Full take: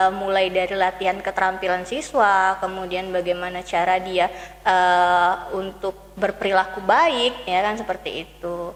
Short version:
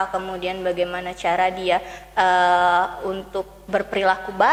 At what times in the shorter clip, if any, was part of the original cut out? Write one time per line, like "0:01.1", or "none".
none